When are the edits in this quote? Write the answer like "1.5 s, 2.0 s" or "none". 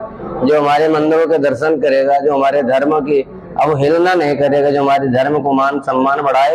none